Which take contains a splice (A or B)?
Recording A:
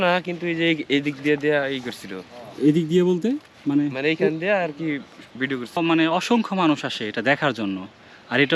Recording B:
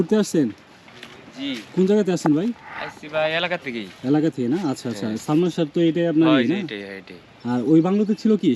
A